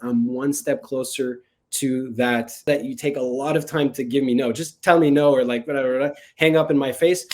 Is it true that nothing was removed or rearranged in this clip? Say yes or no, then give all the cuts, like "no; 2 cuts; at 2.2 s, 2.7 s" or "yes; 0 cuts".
no; 1 cut; at 2.7 s